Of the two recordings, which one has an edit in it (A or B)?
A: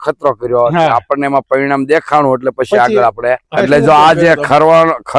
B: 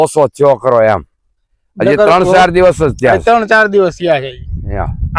A